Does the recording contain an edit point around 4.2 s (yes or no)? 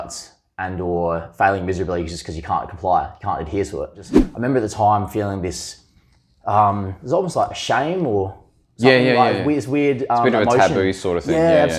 yes